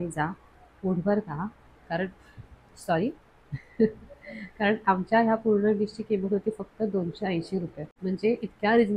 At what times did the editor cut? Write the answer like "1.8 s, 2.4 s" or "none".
7.8 s